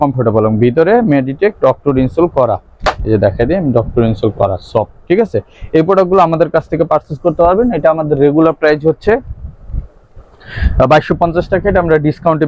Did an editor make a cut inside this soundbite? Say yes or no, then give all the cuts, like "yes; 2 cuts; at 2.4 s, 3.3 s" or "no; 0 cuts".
no; 0 cuts